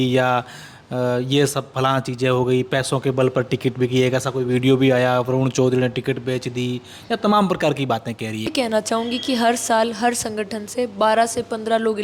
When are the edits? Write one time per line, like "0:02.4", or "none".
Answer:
0:08.5